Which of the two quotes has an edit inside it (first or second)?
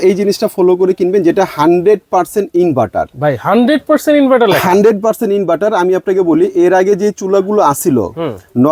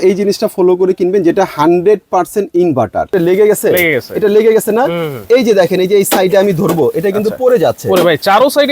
second